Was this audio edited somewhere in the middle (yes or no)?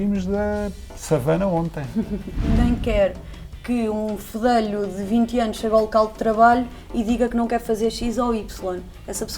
yes